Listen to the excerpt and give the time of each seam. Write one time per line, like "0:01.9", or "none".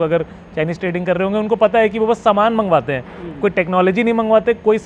none

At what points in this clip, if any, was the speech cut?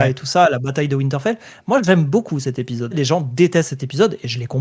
0:03.0

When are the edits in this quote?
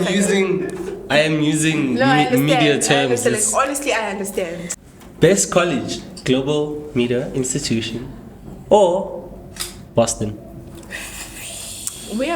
0:04.7

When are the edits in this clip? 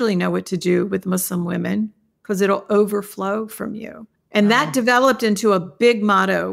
none

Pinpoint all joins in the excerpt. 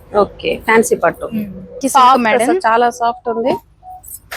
0:01.8

